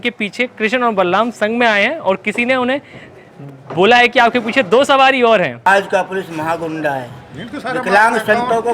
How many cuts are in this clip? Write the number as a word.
one